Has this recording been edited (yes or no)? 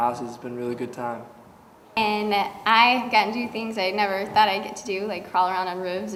no